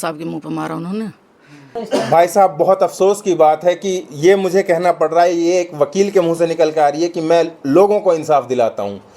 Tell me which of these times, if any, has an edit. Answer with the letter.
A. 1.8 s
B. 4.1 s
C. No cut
A